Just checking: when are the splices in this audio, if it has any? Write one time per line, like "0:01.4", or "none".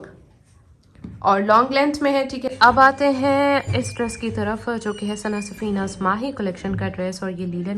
0:02.4